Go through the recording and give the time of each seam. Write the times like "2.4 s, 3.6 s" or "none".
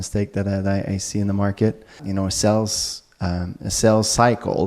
2.0 s